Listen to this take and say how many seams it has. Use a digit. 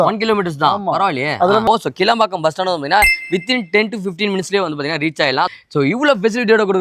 1